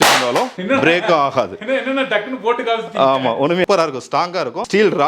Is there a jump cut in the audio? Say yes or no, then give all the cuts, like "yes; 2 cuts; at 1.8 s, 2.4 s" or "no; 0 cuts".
yes; 1 cut; at 3.7 s